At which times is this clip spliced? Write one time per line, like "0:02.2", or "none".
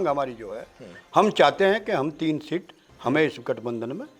none